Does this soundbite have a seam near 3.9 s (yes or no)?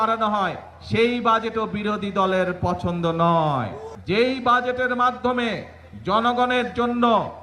yes